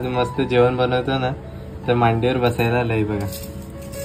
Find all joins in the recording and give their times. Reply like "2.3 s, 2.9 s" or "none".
none